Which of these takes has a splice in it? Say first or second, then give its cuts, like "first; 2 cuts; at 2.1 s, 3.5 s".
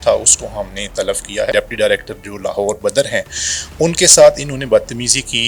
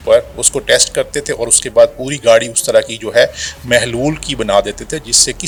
first; 1 cut; at 1.5 s